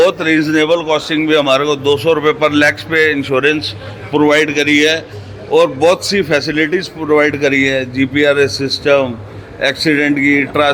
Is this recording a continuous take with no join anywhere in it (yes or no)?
yes